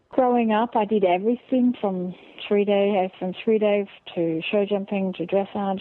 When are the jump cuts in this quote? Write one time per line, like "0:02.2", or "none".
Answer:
none

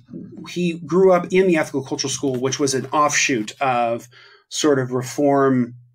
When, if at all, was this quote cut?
none

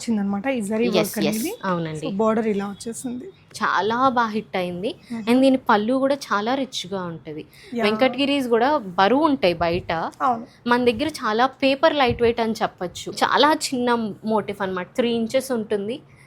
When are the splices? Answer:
0:03.5
0:13.1

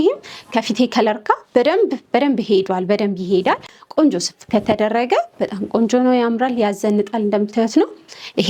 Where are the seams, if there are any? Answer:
none

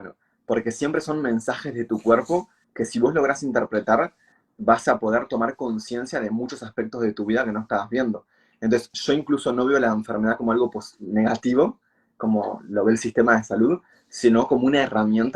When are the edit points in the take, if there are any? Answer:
none

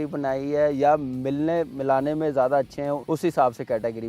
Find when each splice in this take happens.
0:03.0

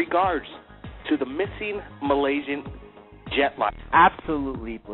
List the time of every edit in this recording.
none

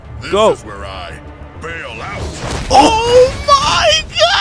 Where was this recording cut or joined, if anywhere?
none

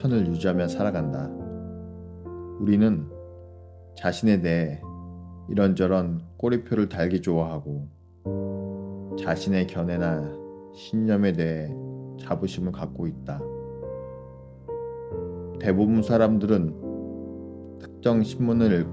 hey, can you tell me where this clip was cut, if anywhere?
0:01.1
0:02.5
0:16.7
0:18.0

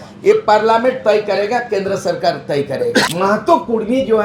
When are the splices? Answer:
0:03.1

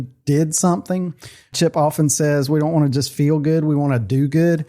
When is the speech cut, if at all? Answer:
0:01.5

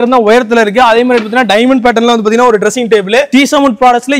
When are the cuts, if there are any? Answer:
0:03.3

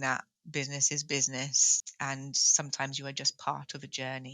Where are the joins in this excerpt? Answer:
0:01.7

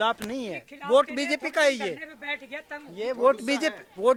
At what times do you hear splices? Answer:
none

